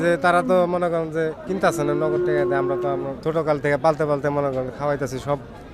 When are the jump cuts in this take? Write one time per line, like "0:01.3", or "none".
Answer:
0:01.4
0:03.1